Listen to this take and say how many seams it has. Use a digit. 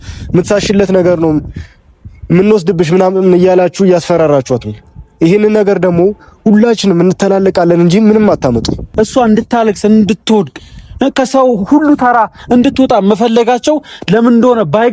1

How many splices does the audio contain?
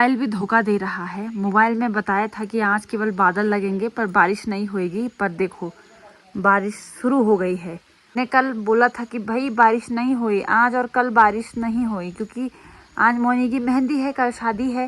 1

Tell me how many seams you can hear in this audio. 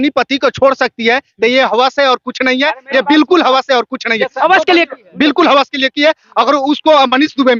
0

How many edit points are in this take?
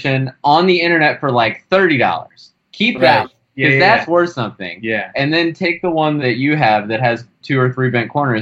1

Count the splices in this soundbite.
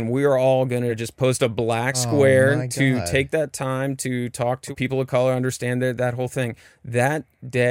3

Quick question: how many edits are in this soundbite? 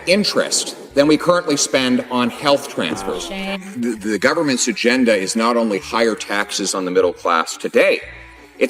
1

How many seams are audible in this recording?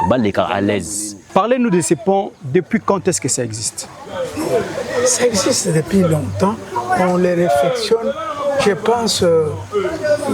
1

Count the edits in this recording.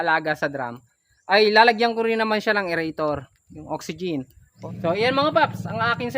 1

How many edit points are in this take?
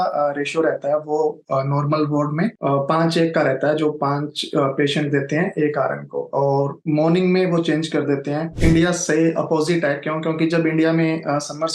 1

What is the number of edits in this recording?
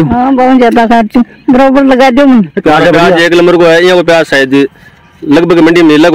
1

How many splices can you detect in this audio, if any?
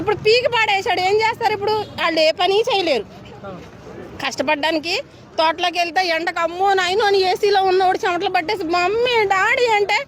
0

